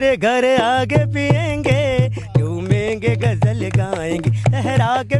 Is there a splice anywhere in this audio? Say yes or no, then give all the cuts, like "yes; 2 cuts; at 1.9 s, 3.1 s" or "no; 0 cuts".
no; 0 cuts